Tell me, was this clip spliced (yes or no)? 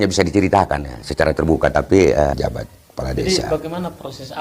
yes